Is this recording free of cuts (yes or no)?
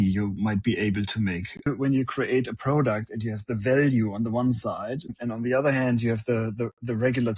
no